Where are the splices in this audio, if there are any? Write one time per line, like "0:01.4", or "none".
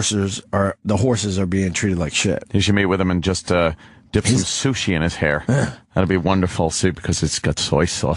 0:06.8